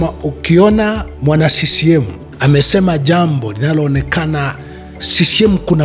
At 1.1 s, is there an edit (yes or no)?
yes